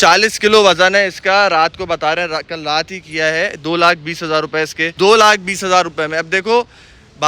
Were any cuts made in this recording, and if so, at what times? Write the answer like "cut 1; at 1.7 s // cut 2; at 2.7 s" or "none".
cut 1; at 4.8 s

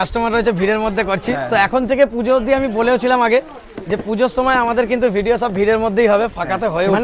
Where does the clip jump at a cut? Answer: none

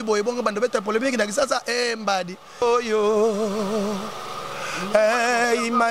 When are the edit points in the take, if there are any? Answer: cut 1; at 2.6 s

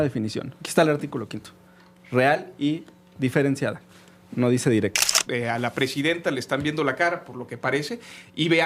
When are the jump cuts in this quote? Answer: cut 1; at 5.1 s

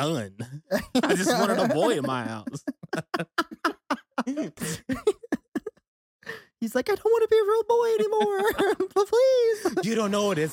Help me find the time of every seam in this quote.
cut 1; at 4.6 s

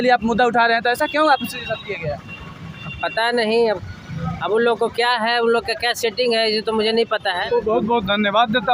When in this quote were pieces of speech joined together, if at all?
cut 1; at 7.4 s

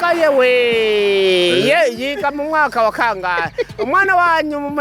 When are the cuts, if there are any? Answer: none

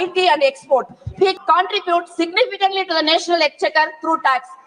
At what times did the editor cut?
cut 1; at 1.3 s

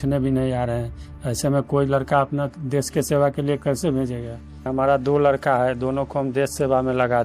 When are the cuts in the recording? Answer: cut 1; at 4.7 s

